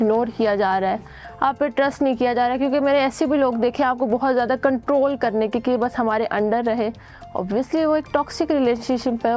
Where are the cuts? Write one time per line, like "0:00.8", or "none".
none